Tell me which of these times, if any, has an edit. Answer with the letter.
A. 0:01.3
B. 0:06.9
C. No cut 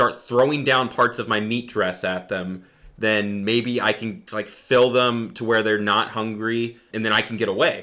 B